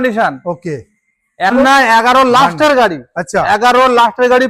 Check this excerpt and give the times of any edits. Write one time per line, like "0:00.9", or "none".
0:01.6